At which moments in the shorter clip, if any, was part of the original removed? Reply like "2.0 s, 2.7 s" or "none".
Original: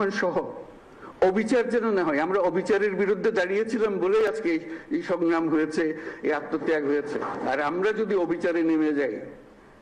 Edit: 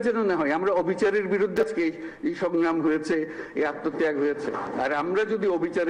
1.6 s

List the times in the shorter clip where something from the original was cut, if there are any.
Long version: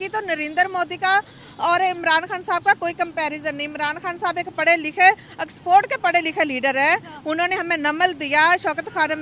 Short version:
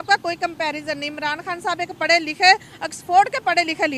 none

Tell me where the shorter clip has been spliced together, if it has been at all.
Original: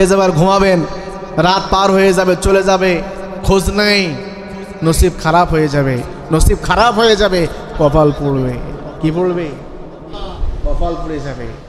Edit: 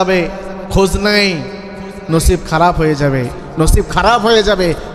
none

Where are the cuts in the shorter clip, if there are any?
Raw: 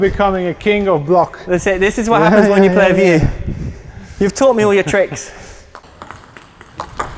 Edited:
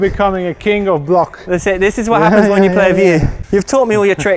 3.4 s

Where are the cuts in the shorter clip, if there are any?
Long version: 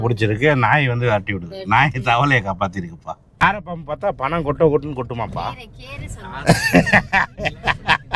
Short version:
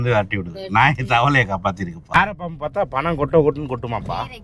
2.0 s

